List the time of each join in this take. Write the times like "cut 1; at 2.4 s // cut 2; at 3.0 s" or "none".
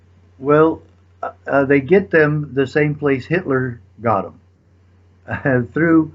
none